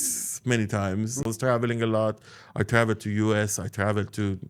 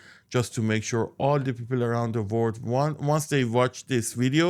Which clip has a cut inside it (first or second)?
first